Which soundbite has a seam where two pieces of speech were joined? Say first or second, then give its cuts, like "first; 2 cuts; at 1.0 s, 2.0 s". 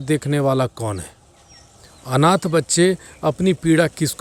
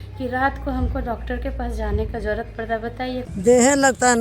second; 1 cut; at 3.3 s